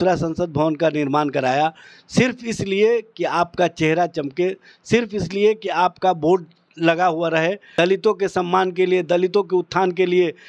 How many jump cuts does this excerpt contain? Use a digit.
1